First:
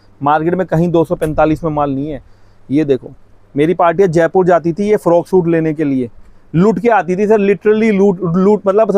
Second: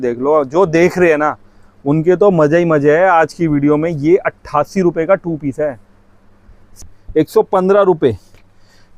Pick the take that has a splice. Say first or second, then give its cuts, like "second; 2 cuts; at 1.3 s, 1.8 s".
second; 1 cut; at 6.7 s